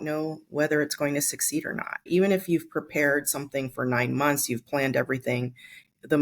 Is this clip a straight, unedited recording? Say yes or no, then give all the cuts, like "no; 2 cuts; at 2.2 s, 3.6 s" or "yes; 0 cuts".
no; 1 cut; at 2.1 s